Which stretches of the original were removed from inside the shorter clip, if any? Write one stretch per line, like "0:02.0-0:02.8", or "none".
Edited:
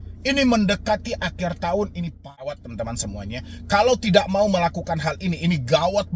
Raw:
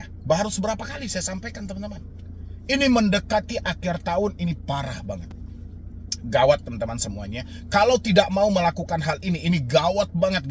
0:05.0-0:06.6